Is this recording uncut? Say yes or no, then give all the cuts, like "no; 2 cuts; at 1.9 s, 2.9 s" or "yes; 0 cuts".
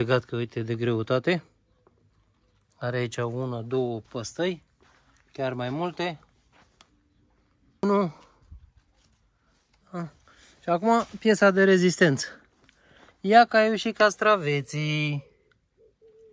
no; 1 cut; at 7.8 s